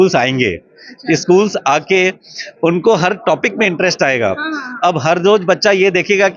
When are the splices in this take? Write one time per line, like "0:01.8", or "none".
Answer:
none